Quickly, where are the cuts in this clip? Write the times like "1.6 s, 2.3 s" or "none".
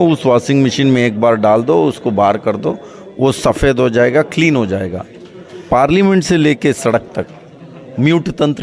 5.6 s